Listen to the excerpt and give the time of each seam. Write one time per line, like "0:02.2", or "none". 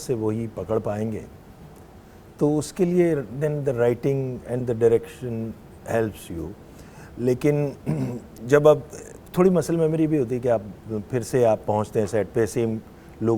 none